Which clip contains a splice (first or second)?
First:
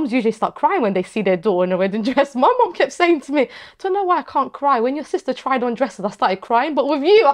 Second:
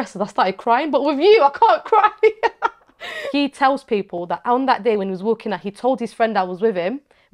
second